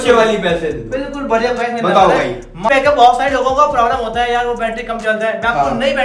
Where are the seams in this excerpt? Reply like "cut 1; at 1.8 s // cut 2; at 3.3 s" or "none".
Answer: cut 1; at 2.7 s